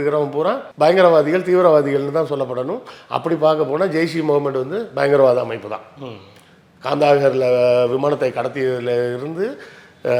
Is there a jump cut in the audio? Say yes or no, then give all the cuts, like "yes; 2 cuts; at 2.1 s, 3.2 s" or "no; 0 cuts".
no; 0 cuts